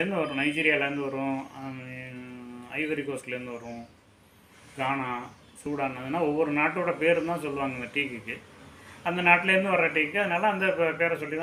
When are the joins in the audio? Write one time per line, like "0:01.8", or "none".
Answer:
none